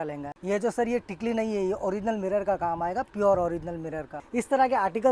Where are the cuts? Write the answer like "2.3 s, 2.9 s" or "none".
4.1 s